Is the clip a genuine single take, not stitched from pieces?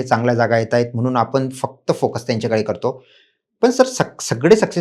yes; 0 cuts

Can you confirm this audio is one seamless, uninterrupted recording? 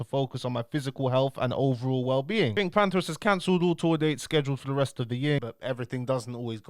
no; 2 cuts; at 2.6 s, 5.4 s

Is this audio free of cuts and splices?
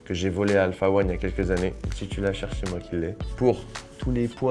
yes; 0 cuts

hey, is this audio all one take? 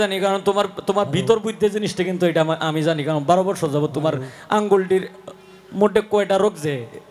yes; 0 cuts

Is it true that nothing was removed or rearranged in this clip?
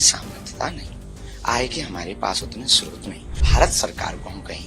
no; 1 cut; at 3.4 s

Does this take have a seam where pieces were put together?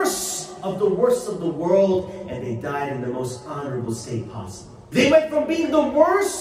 yes; 1 cut; at 4.7 s

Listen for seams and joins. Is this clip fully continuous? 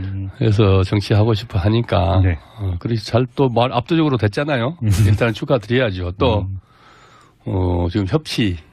yes; 0 cuts

